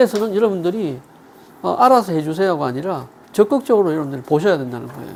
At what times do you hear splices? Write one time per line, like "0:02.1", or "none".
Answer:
none